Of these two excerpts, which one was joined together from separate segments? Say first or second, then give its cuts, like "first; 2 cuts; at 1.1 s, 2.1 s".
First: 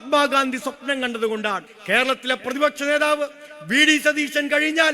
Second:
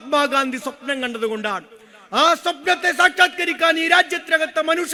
first; 1 cut; at 1.7 s